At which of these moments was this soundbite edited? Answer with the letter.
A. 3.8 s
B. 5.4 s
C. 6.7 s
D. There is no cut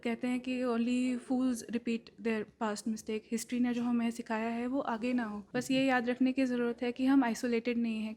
B